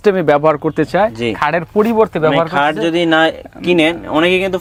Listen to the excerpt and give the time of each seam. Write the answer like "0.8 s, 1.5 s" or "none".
none